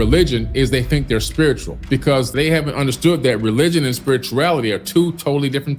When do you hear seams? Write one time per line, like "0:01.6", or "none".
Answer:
0:02.3